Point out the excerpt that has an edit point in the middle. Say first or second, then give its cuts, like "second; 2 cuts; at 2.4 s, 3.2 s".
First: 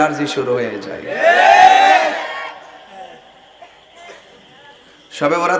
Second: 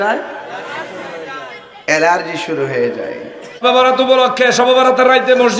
second; 1 cut; at 3.6 s